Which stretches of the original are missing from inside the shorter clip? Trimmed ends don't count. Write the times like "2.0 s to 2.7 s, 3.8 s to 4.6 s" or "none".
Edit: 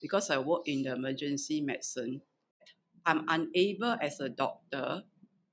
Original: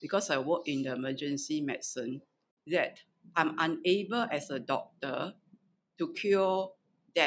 2.6 s to 2.9 s